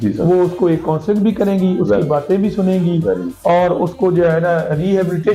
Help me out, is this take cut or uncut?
uncut